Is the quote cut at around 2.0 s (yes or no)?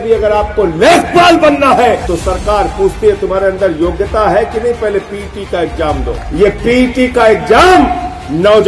yes